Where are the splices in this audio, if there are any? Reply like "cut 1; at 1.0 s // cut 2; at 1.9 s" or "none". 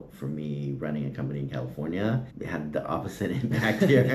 cut 1; at 2.3 s